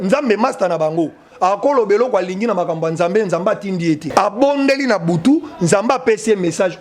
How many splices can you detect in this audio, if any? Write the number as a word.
one